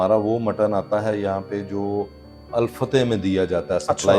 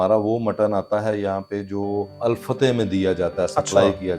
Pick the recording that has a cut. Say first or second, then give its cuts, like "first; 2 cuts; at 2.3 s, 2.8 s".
second; 1 cut; at 2.1 s